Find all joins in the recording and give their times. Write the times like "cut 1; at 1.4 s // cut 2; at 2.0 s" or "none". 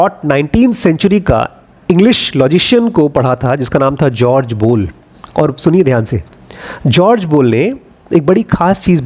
none